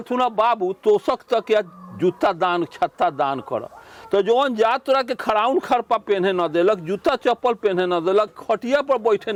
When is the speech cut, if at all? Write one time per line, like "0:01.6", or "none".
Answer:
none

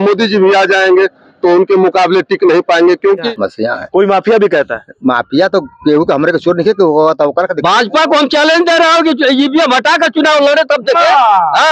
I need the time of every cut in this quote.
0:03.3
0:07.9

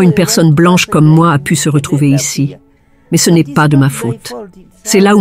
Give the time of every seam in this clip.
none

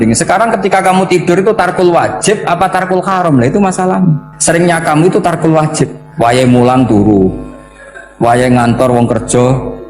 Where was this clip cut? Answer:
0:04.3
0:06.0

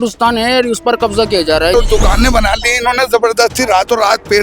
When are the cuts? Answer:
0:01.7

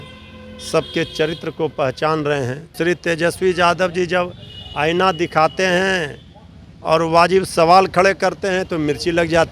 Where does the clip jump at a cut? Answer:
0:02.8

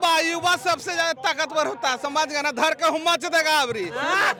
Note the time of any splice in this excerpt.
none

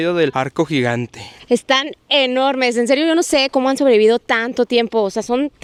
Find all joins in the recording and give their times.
none

